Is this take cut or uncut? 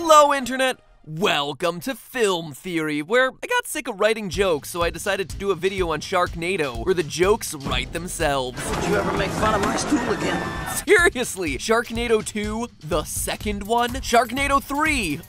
cut